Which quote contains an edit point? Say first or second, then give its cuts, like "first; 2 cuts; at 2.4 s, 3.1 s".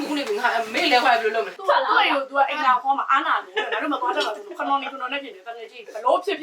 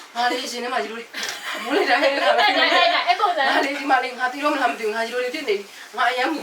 first; 1 cut; at 1.6 s